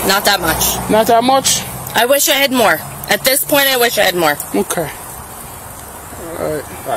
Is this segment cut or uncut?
uncut